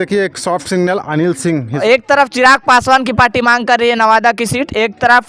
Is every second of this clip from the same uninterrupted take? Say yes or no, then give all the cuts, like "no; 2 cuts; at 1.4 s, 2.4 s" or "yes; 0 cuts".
no; 1 cut; at 1.7 s